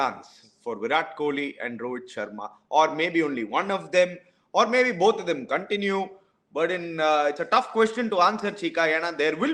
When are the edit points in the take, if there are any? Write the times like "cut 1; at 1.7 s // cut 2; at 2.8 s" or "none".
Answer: none